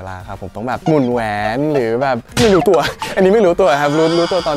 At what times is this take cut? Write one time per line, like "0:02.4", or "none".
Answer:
0:02.3